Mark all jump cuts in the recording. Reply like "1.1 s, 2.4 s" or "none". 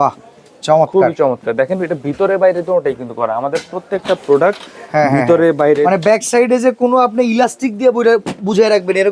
none